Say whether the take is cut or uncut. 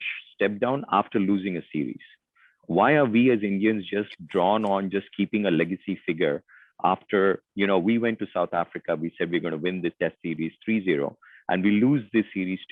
uncut